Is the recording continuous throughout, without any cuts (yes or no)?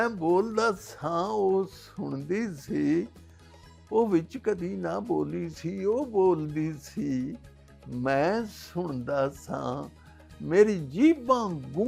yes